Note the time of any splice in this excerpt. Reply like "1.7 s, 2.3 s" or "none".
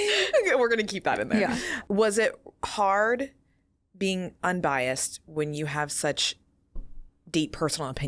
1.7 s